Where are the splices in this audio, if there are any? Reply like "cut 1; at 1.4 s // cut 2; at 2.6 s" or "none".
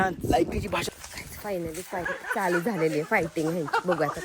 cut 1; at 1.0 s